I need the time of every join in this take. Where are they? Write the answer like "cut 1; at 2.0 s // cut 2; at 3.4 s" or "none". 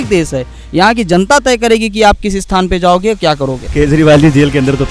cut 1; at 3.6 s